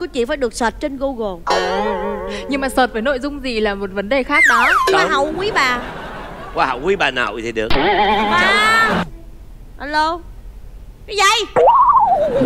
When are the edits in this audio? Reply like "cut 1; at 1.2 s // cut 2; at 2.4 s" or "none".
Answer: cut 1; at 9.0 s

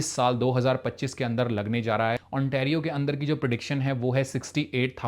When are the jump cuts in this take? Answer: cut 1; at 2.2 s

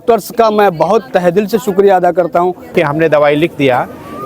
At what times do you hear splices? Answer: cut 1; at 2.7 s

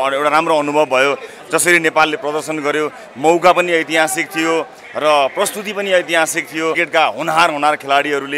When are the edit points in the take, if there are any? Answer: cut 1; at 6.8 s

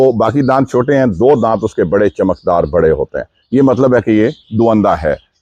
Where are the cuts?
none

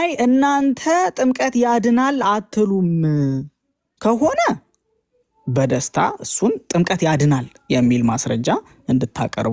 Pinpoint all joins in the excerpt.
none

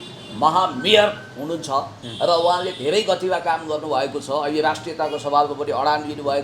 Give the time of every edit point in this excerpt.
none

